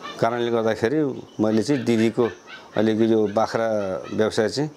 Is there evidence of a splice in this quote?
no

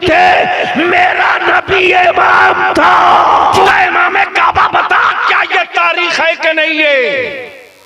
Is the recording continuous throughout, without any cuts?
no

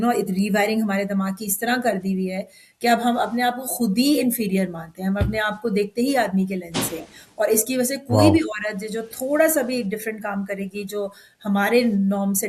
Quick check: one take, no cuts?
yes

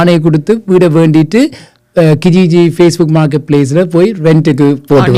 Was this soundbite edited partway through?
no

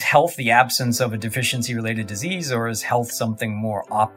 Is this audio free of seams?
yes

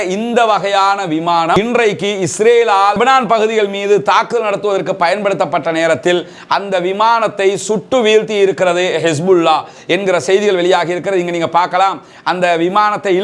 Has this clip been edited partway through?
no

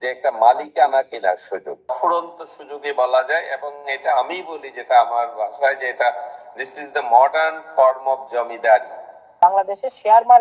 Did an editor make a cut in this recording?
yes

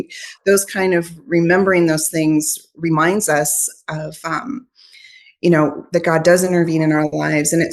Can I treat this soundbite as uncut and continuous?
yes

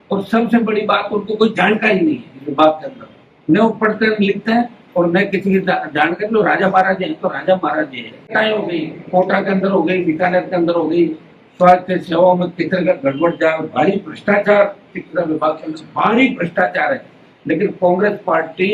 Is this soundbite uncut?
no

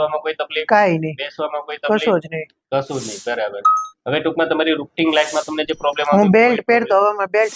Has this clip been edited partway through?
no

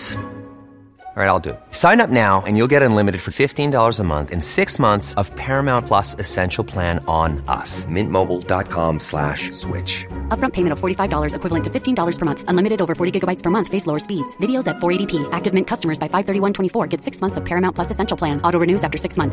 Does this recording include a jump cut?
no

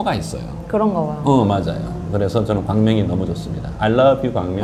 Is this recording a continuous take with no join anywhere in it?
yes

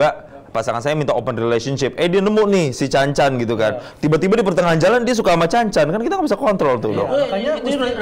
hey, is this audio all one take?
yes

